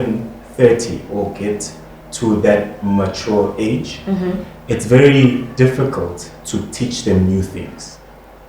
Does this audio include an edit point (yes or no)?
no